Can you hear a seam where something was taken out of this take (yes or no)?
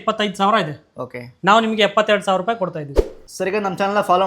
yes